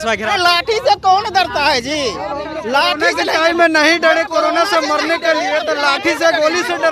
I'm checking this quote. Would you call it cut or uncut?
uncut